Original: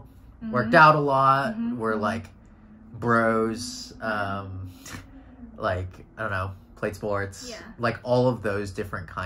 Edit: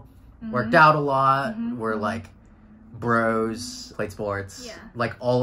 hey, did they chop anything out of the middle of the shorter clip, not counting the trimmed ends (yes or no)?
yes